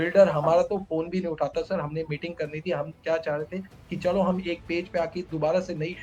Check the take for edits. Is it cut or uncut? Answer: uncut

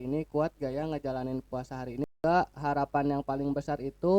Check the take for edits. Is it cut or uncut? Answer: cut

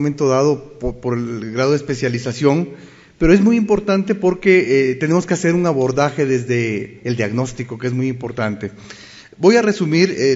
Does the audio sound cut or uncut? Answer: uncut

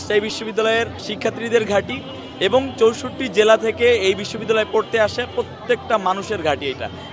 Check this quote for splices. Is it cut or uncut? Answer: cut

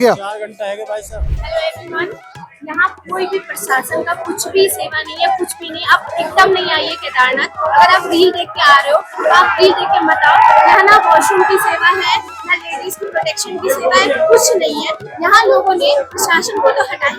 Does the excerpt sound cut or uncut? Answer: cut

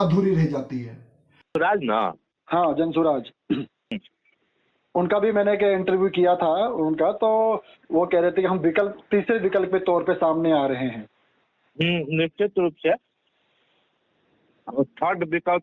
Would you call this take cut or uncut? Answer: cut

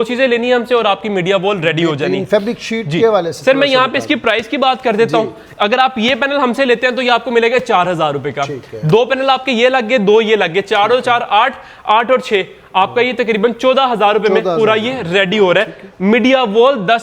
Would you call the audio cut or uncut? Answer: uncut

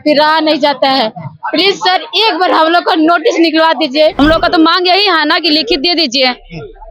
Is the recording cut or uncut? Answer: cut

